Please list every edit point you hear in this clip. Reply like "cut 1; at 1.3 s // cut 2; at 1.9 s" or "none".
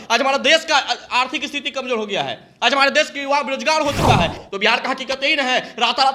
cut 1; at 4.4 s